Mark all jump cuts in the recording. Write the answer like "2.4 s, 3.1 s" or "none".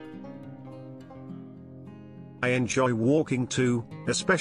2.4 s